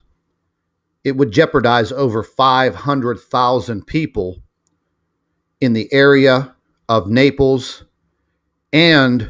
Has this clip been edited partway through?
yes; 1 cut; at 7.7 s

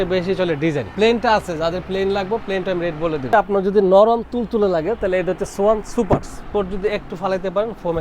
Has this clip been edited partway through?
yes; 3 cuts; at 0.9 s, 3.3 s, 6.3 s

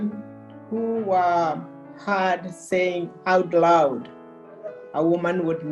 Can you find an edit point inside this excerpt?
no; 0 cuts

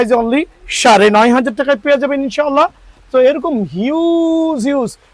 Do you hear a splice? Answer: no; 0 cuts

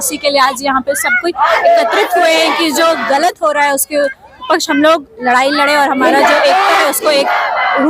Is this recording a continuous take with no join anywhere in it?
yes; 0 cuts

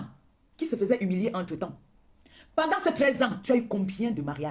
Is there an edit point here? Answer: no; 0 cuts

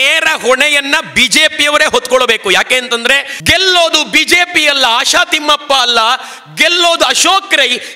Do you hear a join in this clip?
yes; 1 cut; at 3.3 s

